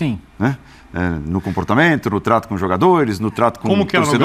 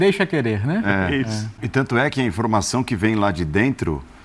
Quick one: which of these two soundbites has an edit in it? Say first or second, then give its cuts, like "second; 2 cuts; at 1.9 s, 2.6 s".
second; 1 cut; at 1.6 s